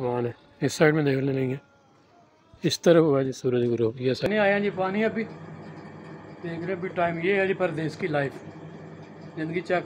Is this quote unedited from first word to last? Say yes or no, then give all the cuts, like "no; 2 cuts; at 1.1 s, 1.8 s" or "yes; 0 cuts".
no; 1 cut; at 4.3 s